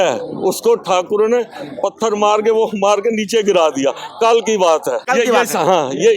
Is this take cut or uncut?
cut